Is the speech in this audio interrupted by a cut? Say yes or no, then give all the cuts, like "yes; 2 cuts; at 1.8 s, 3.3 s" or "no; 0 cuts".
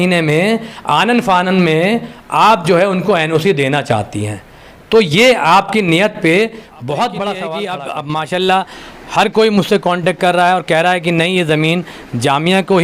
yes; 1 cut; at 7.7 s